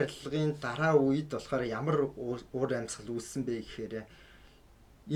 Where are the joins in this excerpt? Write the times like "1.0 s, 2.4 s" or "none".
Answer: none